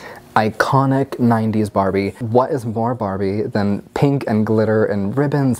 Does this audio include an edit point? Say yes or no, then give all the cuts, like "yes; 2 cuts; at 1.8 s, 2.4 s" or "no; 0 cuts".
yes; 1 cut; at 2.2 s